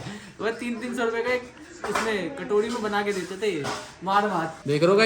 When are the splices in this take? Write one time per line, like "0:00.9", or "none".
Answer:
none